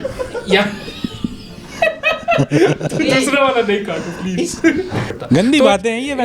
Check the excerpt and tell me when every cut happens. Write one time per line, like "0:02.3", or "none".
0:05.1